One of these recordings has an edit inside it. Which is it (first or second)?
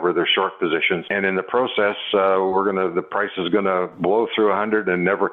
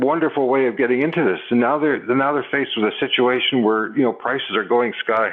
first